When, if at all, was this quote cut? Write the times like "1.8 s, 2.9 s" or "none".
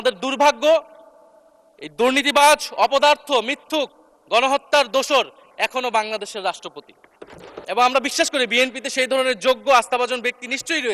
7.5 s